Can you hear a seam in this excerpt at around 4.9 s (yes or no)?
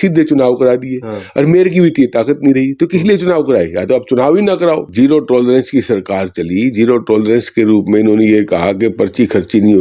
yes